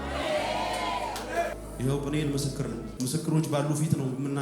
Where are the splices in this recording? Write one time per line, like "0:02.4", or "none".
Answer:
0:01.6
0:02.9